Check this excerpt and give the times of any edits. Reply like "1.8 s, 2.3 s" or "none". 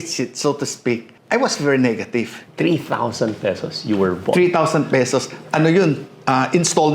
1.1 s, 2.4 s